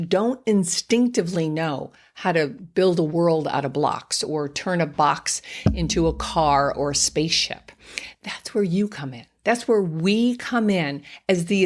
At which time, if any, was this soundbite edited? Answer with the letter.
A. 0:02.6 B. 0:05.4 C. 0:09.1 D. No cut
A